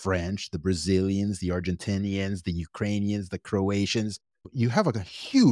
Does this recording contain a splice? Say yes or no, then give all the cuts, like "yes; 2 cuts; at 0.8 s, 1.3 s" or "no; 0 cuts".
no; 0 cuts